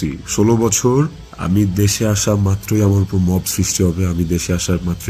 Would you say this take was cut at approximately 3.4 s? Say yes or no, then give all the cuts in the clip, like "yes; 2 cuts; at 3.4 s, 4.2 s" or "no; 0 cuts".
no; 1 cut; at 1.2 s